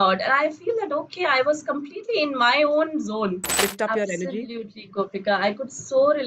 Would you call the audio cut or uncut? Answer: cut